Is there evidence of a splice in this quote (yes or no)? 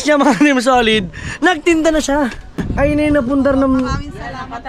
yes